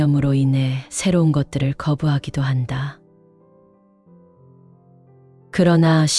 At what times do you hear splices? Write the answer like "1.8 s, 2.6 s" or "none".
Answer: 3.0 s, 5.4 s